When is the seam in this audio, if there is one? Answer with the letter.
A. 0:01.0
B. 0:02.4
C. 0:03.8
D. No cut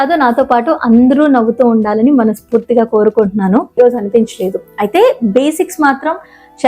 C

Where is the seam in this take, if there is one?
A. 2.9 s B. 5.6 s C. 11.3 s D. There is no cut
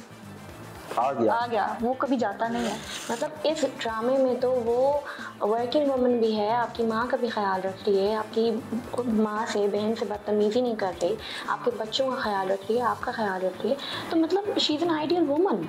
A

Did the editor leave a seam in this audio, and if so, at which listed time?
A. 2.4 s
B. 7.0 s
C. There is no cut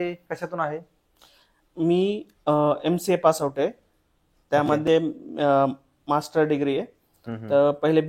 C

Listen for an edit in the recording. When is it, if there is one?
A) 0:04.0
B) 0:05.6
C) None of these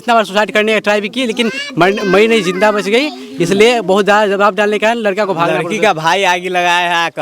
B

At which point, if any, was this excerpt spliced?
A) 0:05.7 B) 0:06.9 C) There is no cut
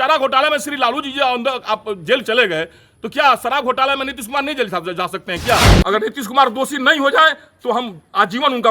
A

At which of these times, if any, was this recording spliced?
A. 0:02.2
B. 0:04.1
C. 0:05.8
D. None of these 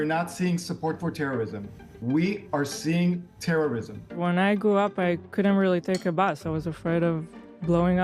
B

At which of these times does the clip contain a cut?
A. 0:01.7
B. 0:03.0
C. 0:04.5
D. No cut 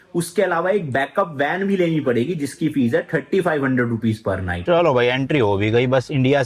C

